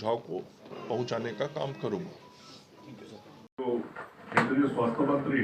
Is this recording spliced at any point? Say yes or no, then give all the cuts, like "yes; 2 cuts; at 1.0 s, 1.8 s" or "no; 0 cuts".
no; 0 cuts